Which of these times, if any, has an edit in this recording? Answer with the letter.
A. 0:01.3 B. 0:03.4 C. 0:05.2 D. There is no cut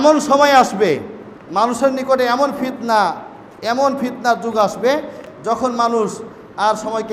C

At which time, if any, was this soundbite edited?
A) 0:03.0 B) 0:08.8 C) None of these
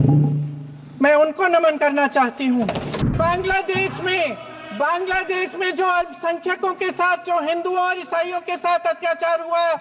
A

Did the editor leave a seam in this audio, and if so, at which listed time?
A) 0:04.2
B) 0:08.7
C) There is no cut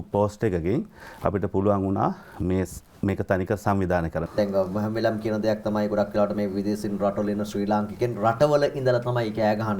A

